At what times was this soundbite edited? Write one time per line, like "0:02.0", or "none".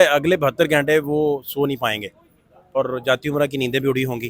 0:02.8